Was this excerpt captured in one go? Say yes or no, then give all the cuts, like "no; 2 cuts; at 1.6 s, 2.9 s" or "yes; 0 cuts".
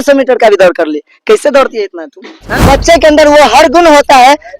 no; 1 cut; at 2.6 s